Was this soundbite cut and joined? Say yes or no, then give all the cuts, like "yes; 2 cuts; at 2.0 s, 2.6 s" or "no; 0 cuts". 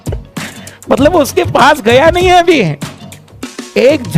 no; 0 cuts